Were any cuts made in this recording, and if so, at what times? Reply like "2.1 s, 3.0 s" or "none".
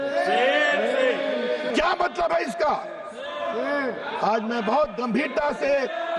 1.7 s